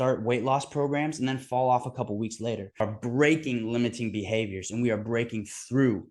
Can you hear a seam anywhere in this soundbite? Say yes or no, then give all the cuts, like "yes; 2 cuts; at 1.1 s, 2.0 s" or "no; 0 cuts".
yes; 1 cut; at 2.8 s